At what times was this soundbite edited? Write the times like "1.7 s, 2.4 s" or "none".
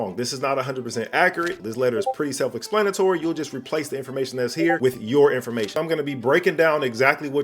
1.6 s, 5.7 s

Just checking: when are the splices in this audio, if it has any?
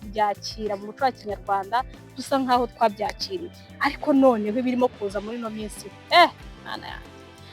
none

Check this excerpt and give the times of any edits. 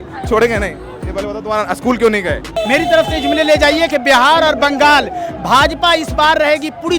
2.6 s

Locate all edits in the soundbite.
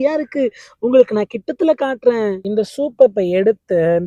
2.4 s

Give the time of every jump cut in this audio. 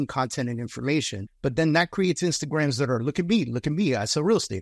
none

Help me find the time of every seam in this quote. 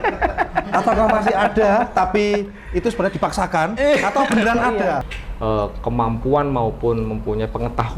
5.2 s

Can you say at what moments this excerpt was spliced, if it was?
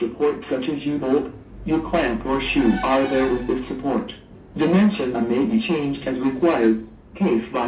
none

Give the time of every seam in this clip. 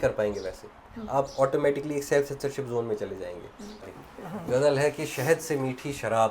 3.8 s

